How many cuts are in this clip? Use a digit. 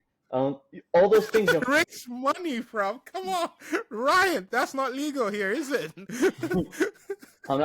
0